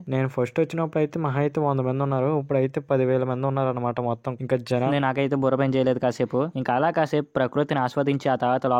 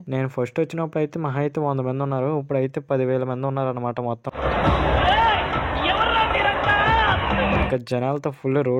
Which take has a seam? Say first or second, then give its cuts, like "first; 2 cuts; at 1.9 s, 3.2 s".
first; 1 cut; at 4.6 s